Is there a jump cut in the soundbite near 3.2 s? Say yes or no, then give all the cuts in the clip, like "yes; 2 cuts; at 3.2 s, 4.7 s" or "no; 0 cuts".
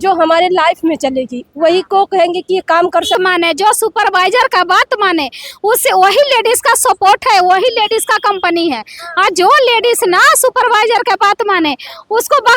yes; 1 cut; at 3.2 s